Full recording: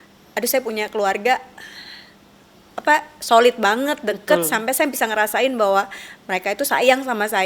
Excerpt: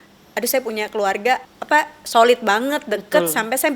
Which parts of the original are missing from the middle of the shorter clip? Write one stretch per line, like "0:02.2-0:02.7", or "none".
0:01.5-0:02.7